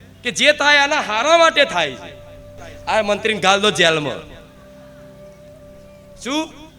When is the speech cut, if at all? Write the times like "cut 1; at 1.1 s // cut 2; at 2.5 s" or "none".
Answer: cut 1; at 2.7 s